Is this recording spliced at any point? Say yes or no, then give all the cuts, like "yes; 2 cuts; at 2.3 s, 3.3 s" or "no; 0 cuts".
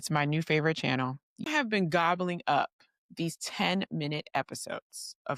yes; 1 cut; at 1.4 s